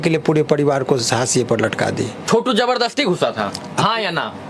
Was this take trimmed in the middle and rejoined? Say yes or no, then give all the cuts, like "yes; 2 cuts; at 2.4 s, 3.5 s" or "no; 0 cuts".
yes; 1 cut; at 2.2 s